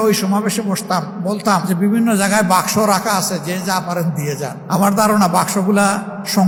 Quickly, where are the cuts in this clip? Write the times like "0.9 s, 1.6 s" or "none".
none